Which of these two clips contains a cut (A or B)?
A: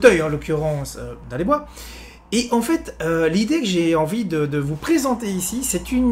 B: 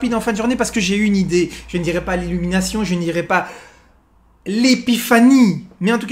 A